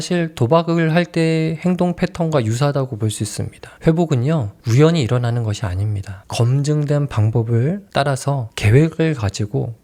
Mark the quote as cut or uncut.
uncut